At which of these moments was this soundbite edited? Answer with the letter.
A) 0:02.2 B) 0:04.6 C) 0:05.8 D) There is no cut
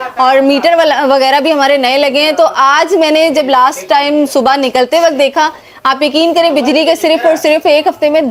D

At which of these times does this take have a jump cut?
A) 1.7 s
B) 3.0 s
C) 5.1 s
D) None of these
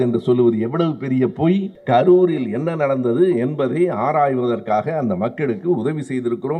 A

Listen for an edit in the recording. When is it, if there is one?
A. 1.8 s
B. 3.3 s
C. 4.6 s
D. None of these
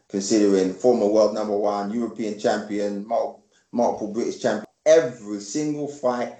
C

